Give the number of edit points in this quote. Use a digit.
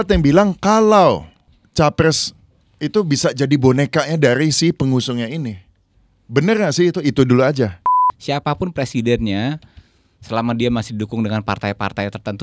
1